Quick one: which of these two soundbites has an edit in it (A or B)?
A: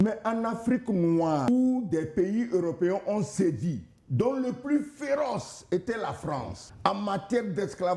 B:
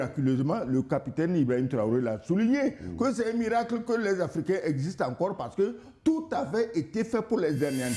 A